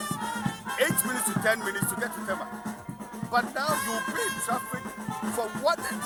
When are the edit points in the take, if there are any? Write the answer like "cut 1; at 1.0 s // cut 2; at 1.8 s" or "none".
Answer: none

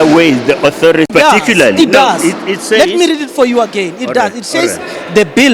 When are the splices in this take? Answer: cut 1; at 1.1 s

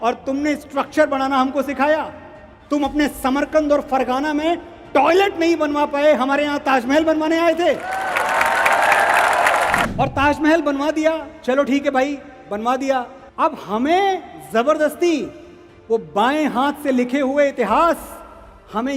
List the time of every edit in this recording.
cut 1; at 9.9 s // cut 2; at 13.2 s

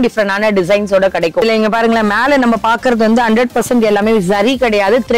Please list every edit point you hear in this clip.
cut 1; at 1.4 s

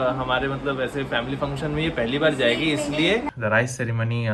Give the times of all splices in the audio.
cut 1; at 3.3 s

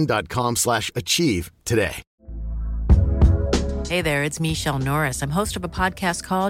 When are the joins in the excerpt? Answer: cut 1; at 2.1 s

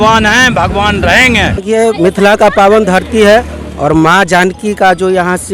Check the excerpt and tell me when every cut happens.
cut 1; at 1.6 s

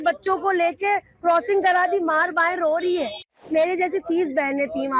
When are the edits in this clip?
cut 1; at 3.4 s

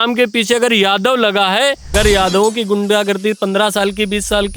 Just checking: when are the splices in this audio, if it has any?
cut 1; at 1.8 s

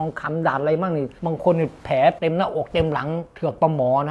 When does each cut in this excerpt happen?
cut 1; at 1.1 s // cut 2; at 2.2 s

